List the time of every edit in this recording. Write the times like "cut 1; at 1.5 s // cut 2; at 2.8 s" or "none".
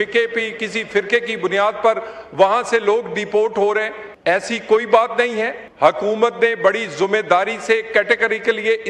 cut 1; at 4.0 s // cut 2; at 5.6 s